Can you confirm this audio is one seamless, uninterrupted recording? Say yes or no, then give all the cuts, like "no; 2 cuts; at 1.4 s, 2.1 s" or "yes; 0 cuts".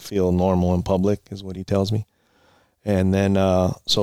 yes; 0 cuts